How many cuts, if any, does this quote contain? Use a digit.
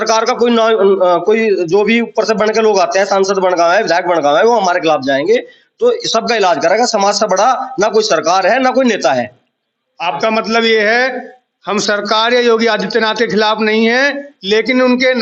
0